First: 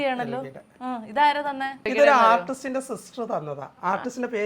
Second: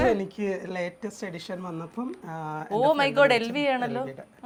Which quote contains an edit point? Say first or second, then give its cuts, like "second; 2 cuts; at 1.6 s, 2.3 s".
first; 1 cut; at 1.9 s